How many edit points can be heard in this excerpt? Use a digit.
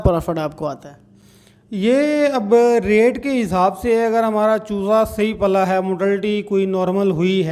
0